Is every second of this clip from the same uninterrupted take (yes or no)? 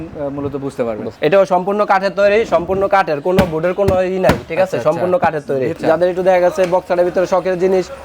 no